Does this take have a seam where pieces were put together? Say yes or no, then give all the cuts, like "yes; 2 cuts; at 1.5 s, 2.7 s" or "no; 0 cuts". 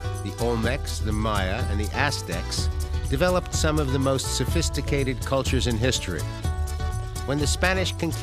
yes; 1 cut; at 3.0 s